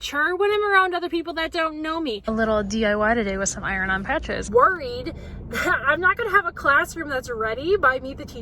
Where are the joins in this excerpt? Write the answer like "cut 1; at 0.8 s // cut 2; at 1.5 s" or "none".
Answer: cut 1; at 2.3 s // cut 2; at 4.5 s